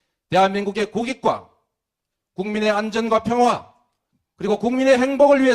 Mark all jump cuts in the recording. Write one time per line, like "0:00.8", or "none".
0:03.6